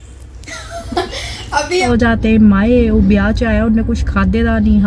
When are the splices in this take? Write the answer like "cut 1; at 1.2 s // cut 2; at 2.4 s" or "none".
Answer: cut 1; at 1.9 s